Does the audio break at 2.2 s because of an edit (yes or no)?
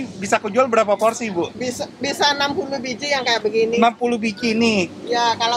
no